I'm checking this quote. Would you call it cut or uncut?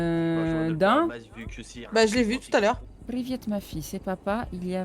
cut